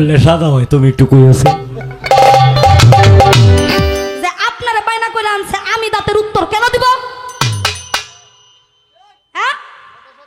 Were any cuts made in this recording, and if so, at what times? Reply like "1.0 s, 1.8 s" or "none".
3.9 s